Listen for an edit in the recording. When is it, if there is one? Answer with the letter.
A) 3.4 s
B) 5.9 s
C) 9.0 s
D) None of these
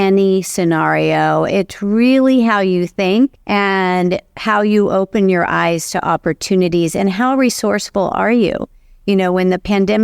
A